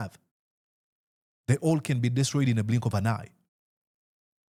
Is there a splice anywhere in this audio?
no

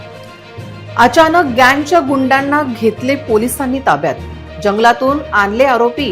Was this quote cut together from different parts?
yes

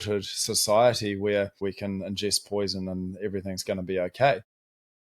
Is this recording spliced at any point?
yes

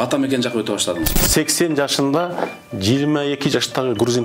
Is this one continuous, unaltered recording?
no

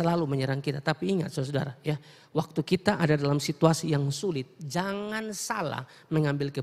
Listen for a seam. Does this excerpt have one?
no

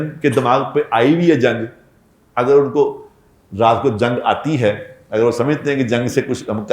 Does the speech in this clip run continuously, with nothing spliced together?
yes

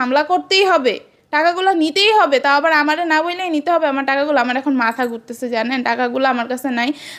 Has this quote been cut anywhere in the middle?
no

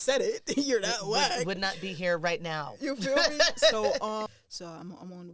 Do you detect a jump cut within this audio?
yes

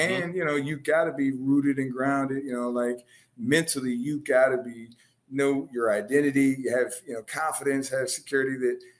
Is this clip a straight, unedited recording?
yes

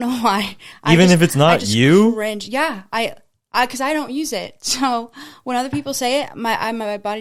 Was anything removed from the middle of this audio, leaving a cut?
no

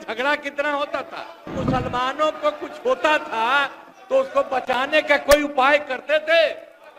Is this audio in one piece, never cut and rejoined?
no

